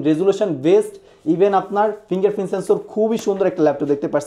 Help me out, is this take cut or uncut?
uncut